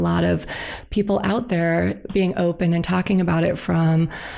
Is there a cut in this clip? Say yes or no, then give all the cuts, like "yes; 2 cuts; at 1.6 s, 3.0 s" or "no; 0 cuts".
no; 0 cuts